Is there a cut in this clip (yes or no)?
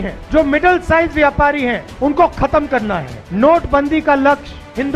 yes